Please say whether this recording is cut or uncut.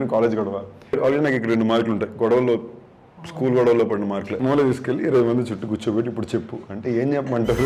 cut